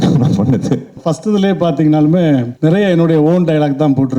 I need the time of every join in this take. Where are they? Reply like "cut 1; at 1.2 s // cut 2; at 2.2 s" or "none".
cut 1; at 1.0 s // cut 2; at 2.5 s